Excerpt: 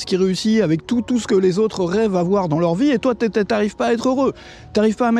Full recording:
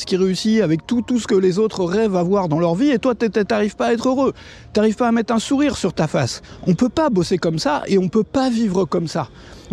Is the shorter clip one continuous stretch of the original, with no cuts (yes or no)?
yes